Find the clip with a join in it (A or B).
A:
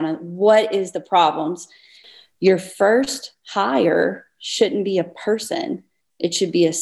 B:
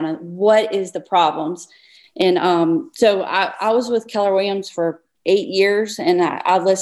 A